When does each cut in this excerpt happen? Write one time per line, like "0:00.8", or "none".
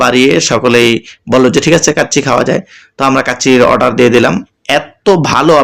0:04.5